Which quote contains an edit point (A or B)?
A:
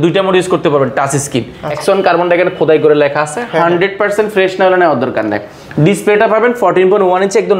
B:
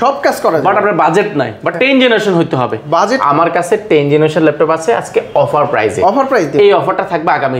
A